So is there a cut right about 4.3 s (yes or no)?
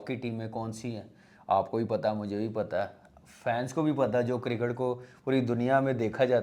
no